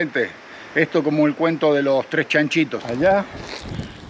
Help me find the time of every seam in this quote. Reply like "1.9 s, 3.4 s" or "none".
2.8 s